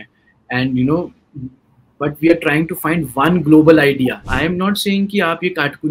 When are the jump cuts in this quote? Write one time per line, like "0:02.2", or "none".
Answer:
0:04.3